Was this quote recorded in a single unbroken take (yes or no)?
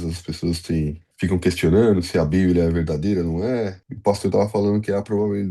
no